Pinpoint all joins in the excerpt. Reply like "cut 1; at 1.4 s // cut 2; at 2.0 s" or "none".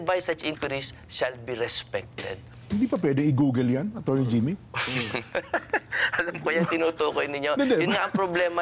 none